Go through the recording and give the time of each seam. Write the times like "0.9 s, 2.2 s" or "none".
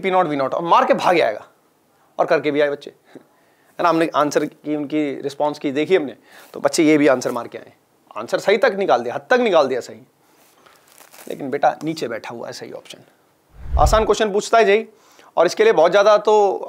13.7 s